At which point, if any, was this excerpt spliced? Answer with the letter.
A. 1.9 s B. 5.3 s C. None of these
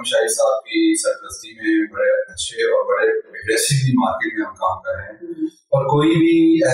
C